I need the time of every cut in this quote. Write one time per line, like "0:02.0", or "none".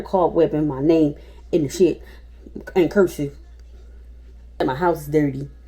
0:04.6